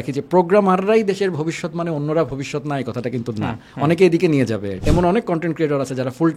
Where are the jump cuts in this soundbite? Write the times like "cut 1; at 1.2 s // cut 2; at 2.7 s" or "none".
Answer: cut 1; at 4.8 s

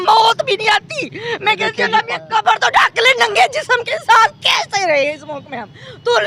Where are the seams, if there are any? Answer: cut 1; at 2.2 s

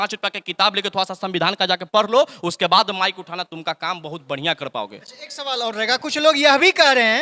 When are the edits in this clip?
none

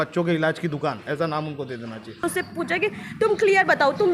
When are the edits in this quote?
cut 1; at 2.2 s

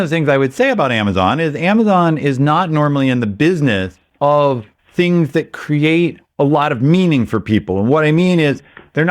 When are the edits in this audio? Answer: cut 1; at 4.0 s // cut 2; at 4.8 s // cut 3; at 6.2 s

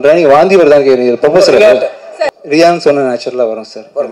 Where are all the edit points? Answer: cut 1; at 2.1 s

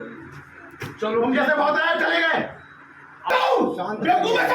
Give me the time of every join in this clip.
cut 1; at 3.3 s

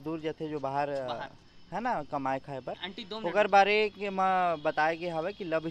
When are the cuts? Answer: none

